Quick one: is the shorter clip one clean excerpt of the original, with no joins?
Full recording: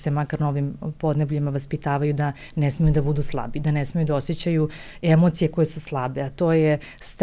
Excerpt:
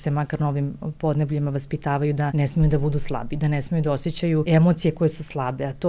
no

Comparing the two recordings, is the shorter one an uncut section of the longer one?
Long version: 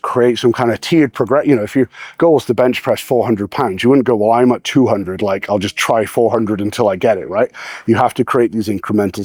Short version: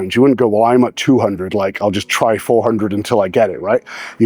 yes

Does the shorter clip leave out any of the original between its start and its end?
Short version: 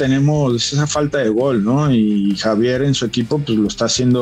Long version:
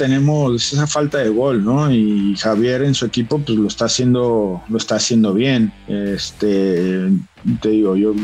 no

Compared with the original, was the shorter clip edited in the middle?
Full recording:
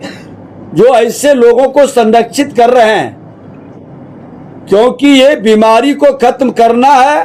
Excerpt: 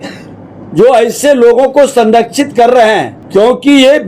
yes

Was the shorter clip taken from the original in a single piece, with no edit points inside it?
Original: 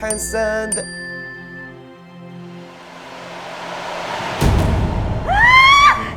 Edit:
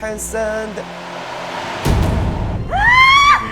no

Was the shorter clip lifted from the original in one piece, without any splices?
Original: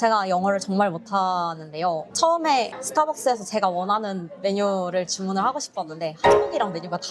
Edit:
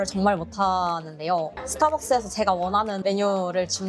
no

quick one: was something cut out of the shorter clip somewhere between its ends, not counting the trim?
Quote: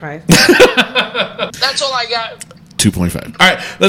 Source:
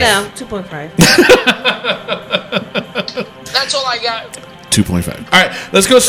yes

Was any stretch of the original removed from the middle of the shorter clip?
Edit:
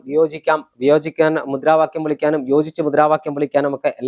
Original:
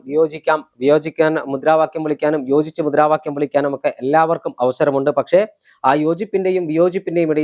no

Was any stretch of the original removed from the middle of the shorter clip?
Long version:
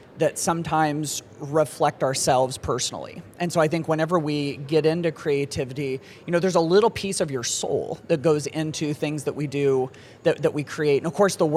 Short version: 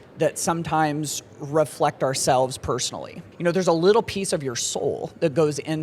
yes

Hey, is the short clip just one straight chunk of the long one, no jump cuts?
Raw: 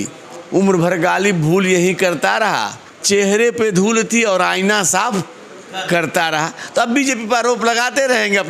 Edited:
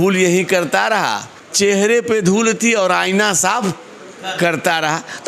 yes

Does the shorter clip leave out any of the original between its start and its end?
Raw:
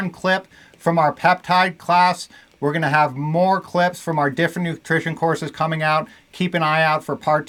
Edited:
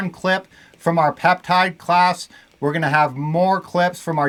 no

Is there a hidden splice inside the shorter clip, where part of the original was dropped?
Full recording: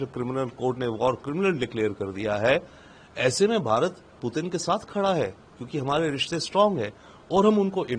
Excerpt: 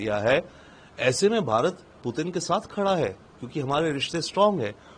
no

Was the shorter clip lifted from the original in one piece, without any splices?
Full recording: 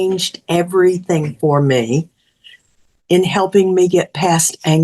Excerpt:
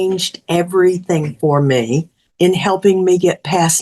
no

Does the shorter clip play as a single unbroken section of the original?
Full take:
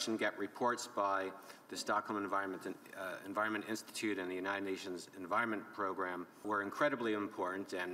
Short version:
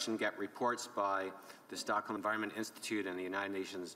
no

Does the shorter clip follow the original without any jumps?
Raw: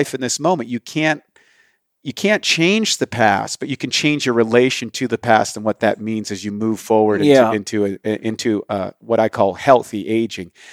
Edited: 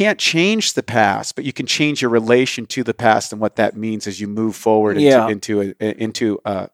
yes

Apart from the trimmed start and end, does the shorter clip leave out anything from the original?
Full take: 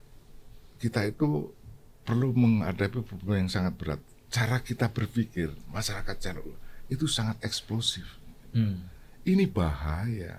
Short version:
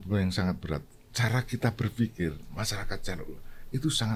no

